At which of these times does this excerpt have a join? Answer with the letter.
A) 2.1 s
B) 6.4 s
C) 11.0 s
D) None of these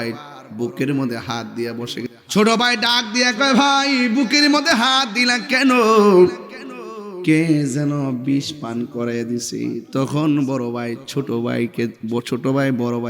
A